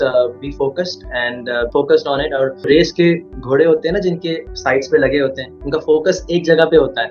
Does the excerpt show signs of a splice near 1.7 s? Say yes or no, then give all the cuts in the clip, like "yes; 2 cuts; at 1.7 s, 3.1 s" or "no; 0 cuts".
yes; 2 cuts; at 1.7 s, 2.7 s